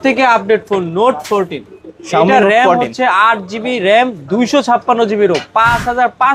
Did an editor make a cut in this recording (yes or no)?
no